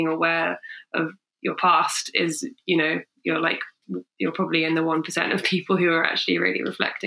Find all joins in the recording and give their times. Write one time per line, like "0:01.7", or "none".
0:01.2